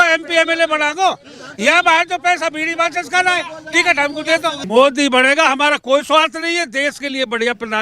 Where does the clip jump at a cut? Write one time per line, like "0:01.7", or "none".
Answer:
0:04.6